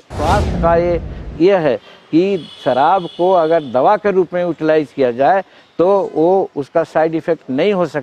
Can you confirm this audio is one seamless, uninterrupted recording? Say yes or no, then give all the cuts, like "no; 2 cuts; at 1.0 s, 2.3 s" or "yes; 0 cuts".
yes; 0 cuts